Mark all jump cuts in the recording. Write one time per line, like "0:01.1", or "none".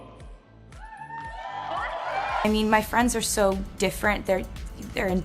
0:02.5